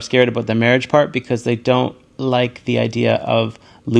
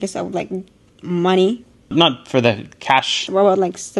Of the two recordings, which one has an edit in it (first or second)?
second